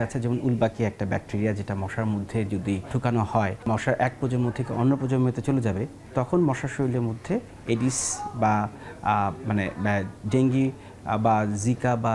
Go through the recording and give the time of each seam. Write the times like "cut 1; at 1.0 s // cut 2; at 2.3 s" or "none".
cut 1; at 3.7 s // cut 2; at 5.9 s